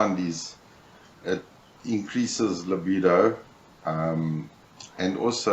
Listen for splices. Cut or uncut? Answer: uncut